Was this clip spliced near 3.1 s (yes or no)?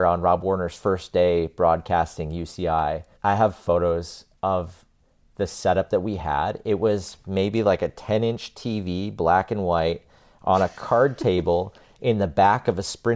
yes